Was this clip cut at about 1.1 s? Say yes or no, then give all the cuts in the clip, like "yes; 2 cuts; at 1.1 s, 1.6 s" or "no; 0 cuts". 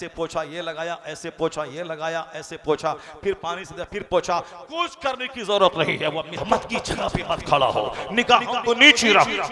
no; 1 cut; at 6.4 s